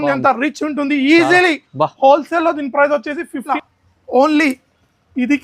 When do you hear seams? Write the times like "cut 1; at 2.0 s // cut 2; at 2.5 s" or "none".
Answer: cut 1; at 3.5 s